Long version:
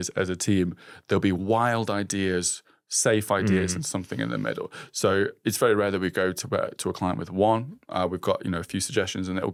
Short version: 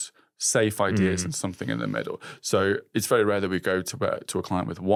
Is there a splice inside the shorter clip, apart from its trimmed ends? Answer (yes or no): no